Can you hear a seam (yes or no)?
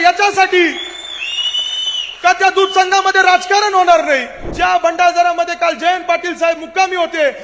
yes